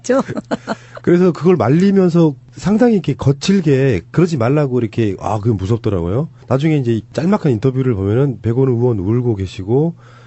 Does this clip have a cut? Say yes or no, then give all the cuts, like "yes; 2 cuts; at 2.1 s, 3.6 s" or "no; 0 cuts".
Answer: yes; 1 cut; at 6.8 s